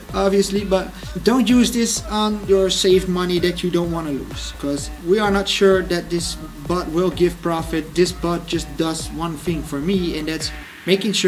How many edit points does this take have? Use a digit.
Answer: 1